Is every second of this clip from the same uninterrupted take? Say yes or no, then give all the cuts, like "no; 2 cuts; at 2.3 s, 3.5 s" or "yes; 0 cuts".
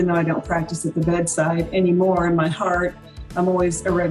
yes; 0 cuts